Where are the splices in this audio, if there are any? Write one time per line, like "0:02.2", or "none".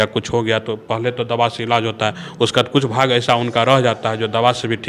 none